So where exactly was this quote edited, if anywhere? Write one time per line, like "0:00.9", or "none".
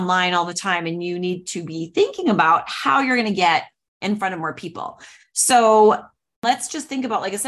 0:06.4